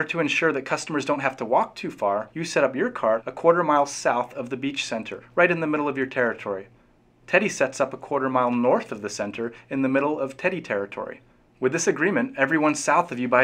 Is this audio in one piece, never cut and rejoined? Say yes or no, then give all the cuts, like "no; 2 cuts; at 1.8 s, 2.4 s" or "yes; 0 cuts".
no; 1 cut; at 3.0 s